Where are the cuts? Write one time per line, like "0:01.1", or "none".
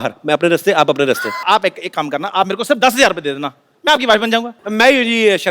0:01.4
0:04.6